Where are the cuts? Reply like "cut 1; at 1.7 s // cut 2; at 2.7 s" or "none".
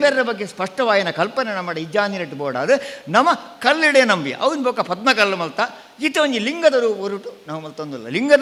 none